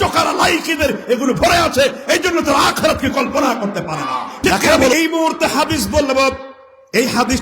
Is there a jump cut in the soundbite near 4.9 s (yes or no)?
yes